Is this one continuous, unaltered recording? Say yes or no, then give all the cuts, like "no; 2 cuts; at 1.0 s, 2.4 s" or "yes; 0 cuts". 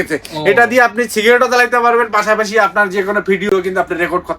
no; 1 cut; at 3.5 s